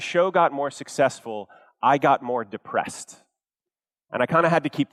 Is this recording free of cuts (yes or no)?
yes